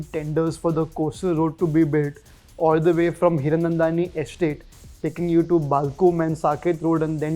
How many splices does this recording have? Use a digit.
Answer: 0